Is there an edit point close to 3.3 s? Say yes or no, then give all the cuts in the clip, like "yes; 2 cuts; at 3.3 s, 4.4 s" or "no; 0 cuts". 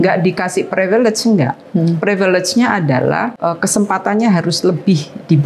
yes; 1 cut; at 3.3 s